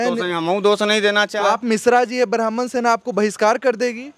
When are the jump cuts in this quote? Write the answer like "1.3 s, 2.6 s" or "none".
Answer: 1.3 s